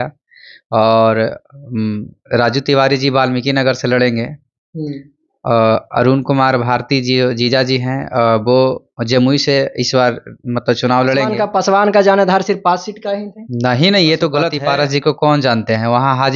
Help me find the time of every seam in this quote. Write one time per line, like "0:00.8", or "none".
0:11.4
0:14.6